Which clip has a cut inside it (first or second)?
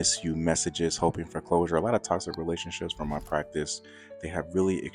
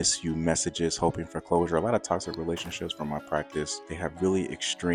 second